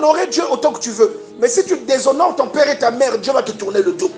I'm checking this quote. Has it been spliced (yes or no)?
no